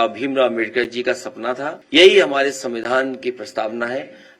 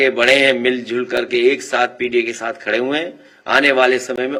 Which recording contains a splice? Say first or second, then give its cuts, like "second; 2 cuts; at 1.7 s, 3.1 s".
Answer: first; 1 cut; at 1.7 s